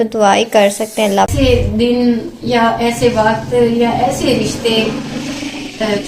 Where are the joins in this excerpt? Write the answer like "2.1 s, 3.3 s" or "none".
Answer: 1.3 s